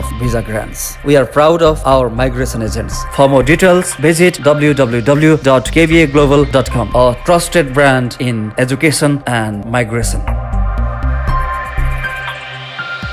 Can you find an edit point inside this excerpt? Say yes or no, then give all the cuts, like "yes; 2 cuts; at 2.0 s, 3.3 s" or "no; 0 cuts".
no; 0 cuts